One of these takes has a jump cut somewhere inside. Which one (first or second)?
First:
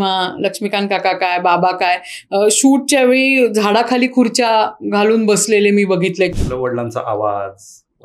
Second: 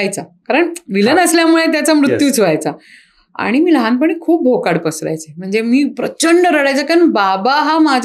first